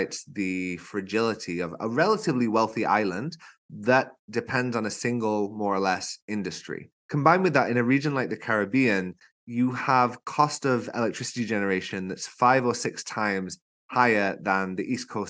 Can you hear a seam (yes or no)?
no